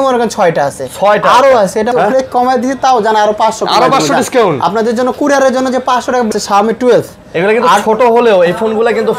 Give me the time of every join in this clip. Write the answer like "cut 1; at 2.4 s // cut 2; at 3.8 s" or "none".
cut 1; at 1.9 s // cut 2; at 6.3 s